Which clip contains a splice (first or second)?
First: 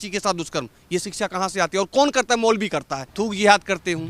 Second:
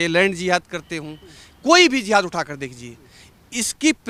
first